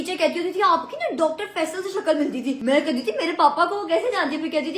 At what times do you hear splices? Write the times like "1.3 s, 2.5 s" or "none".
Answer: 2.6 s